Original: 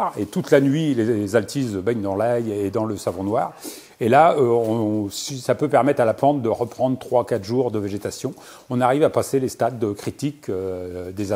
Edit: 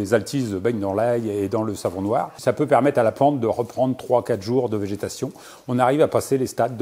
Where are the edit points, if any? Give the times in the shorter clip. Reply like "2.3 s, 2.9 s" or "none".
2.3 s